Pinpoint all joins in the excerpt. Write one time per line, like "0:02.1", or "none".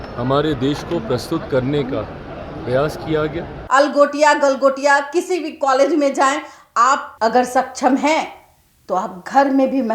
0:03.5
0:07.1